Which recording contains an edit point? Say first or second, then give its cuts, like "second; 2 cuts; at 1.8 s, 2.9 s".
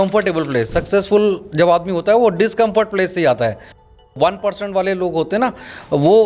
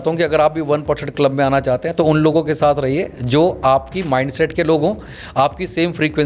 first; 1 cut; at 4.0 s